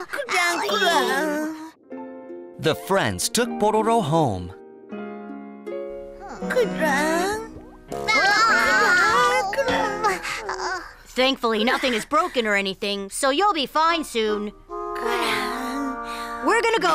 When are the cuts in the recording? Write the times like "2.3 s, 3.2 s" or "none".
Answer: none

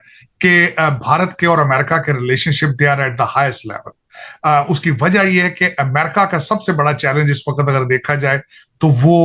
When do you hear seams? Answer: none

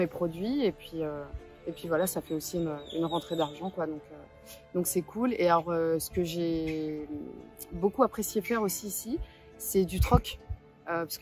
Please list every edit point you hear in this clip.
none

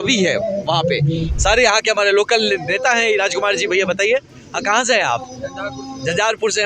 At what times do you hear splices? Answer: 1.3 s

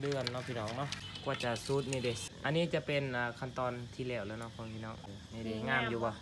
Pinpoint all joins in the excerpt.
1.1 s, 2.3 s, 5.2 s

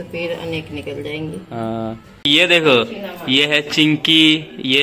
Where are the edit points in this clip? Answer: 2.3 s

